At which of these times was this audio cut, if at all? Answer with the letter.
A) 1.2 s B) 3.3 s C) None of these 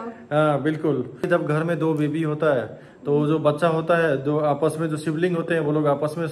A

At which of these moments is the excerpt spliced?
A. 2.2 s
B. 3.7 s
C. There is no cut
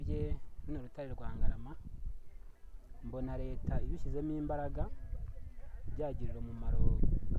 C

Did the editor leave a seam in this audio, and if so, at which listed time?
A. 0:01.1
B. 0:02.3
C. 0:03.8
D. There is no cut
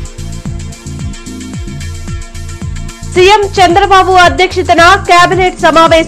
A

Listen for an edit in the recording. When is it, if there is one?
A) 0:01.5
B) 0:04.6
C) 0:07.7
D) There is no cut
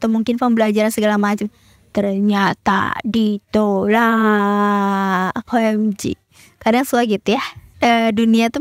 D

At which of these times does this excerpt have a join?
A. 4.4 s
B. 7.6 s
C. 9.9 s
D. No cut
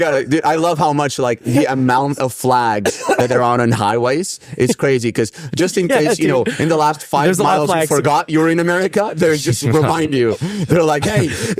D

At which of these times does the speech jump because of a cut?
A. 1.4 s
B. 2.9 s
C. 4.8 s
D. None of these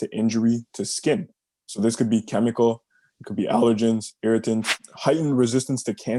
C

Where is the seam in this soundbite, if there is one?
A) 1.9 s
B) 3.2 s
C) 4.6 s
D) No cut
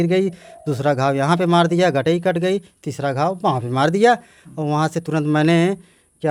D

